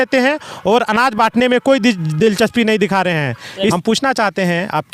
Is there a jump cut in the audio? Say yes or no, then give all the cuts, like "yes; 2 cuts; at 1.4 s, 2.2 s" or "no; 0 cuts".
yes; 1 cut; at 3.8 s